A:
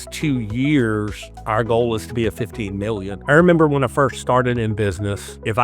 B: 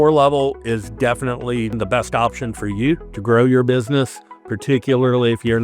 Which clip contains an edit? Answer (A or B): A